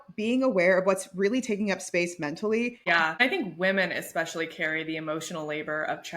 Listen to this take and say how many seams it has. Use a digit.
1